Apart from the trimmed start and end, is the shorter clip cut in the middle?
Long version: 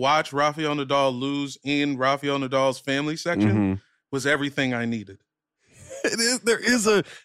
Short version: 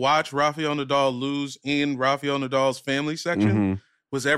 no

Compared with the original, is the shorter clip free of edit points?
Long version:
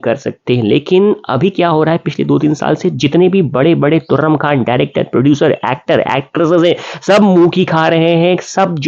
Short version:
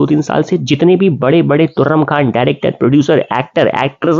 yes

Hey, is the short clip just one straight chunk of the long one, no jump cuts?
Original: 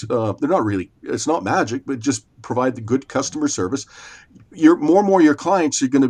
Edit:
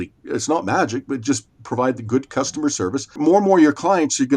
no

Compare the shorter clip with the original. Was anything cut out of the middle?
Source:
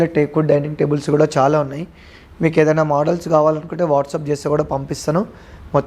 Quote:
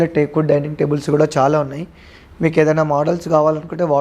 no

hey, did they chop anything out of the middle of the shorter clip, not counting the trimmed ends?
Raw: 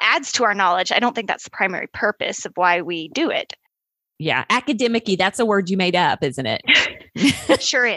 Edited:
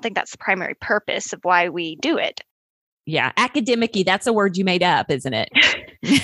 no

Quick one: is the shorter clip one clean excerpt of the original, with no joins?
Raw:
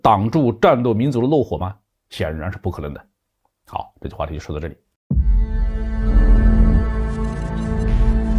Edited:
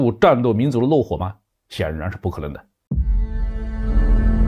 no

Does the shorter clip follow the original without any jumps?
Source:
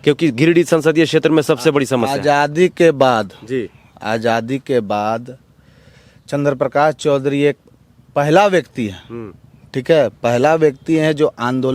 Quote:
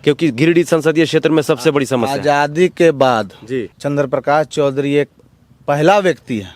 no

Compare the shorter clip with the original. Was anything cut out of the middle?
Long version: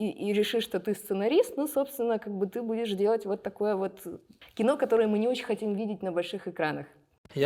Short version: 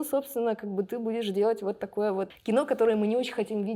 yes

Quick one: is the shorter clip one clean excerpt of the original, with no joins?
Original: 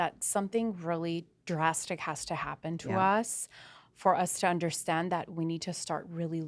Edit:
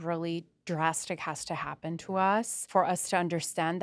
no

